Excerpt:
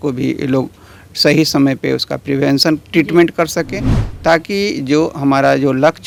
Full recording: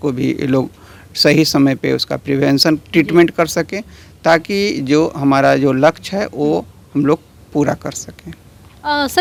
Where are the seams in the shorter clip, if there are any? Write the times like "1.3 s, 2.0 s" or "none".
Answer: none